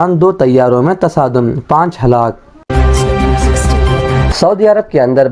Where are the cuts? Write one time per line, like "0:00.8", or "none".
0:02.7
0:04.3